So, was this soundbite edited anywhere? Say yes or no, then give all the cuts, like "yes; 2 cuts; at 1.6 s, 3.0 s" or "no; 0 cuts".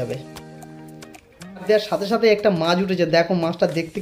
yes; 1 cut; at 1.6 s